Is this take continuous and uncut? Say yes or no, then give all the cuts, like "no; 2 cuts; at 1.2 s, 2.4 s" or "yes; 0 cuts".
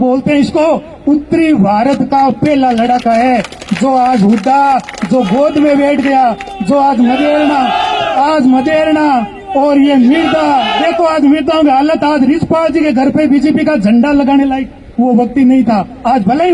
yes; 0 cuts